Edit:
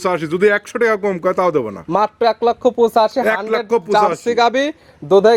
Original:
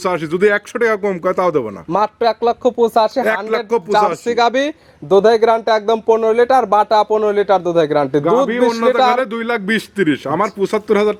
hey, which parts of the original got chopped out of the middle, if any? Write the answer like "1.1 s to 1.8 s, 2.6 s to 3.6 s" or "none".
none